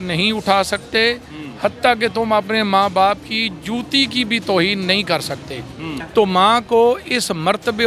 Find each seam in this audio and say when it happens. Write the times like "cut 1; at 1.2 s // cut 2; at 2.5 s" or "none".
cut 1; at 6.0 s

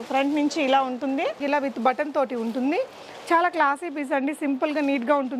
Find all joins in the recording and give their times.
cut 1; at 1.4 s

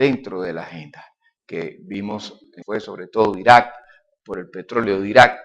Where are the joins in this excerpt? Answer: none

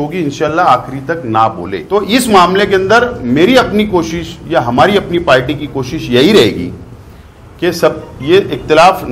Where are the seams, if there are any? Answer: cut 1; at 1.7 s

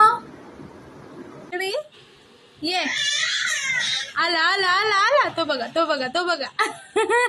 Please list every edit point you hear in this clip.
cut 1; at 1.5 s

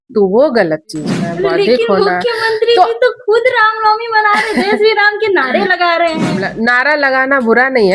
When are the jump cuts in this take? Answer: cut 1; at 1.2 s // cut 2; at 6.5 s

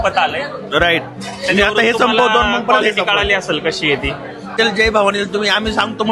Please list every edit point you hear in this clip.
cut 1; at 4.6 s

